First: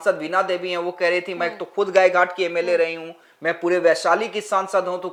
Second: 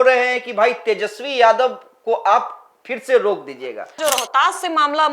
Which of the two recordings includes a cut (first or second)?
second